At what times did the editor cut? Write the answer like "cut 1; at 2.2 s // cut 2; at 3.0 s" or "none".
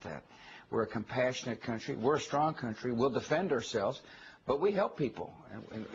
cut 1; at 2.3 s